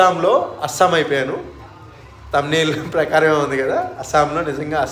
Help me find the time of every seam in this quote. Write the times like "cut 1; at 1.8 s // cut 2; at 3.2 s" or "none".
none